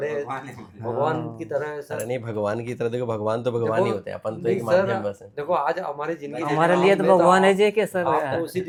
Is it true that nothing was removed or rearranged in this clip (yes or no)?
yes